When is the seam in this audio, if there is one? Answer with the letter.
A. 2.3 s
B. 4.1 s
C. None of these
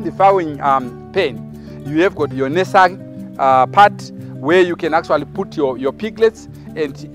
A